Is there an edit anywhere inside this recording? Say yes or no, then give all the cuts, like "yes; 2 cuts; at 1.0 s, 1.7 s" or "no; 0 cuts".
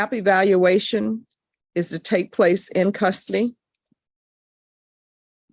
no; 0 cuts